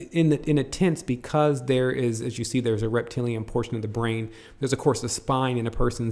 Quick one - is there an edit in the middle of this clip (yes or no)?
yes